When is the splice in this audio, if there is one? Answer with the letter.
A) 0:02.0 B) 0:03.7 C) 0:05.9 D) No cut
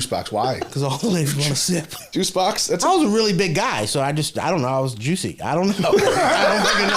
A